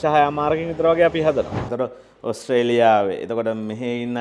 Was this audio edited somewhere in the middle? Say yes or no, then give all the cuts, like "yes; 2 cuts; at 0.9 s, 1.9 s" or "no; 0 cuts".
yes; 1 cut; at 1.6 s